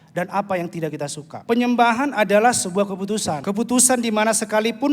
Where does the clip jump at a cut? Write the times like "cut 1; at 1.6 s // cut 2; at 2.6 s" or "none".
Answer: cut 1; at 1.3 s // cut 2; at 3.4 s

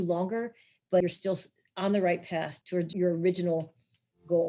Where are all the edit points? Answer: cut 1; at 1.0 s // cut 2; at 2.9 s

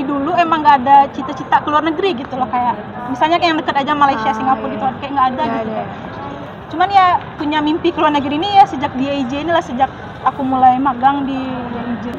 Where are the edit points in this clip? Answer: cut 1; at 6.4 s

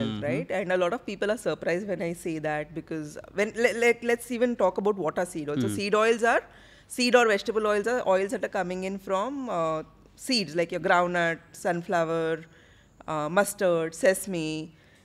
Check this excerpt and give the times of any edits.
none

